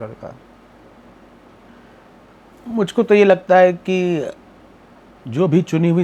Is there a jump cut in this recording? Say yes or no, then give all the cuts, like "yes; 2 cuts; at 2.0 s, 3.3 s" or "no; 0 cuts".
no; 0 cuts